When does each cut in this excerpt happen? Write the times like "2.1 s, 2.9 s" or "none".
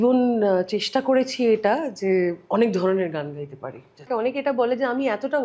4.1 s